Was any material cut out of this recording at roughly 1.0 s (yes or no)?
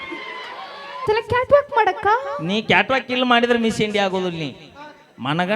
yes